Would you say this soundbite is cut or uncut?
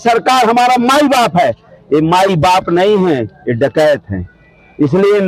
uncut